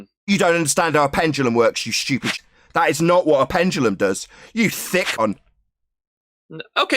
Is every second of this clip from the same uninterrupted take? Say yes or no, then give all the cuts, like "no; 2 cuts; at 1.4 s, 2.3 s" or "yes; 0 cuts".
no; 2 cuts; at 2.4 s, 5.2 s